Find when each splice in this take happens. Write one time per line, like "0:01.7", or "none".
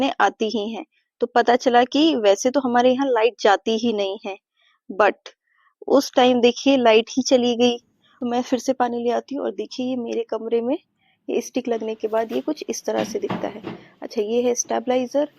0:08.1